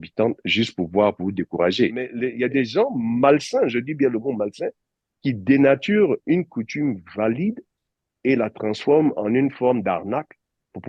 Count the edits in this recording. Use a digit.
1